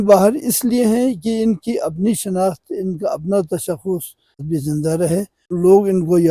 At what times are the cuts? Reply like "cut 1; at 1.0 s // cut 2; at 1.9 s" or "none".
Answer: cut 1; at 4.4 s // cut 2; at 5.4 s